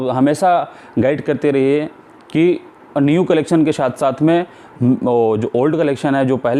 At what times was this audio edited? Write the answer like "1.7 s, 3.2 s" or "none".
none